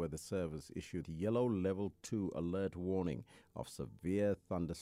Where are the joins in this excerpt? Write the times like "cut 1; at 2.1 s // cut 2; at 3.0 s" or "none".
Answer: cut 1; at 1.0 s